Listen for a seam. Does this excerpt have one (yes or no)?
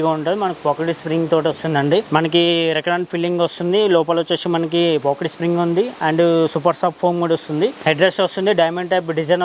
yes